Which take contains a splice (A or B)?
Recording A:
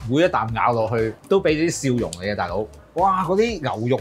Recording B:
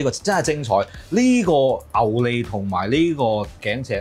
A